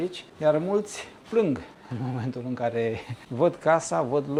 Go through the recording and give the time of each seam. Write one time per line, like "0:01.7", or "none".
none